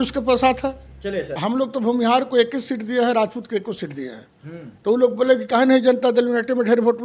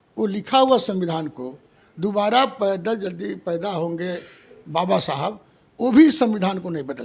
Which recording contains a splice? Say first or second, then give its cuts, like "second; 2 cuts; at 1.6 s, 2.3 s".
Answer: first; 1 cut; at 1.3 s